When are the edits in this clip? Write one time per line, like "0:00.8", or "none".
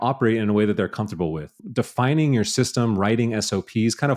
0:01.5